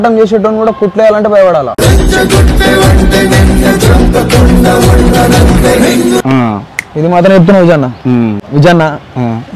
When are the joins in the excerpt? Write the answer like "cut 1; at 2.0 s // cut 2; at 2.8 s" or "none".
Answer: cut 1; at 1.7 s // cut 2; at 8.4 s